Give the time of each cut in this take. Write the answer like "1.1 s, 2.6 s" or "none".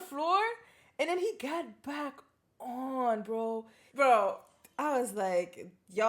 3.8 s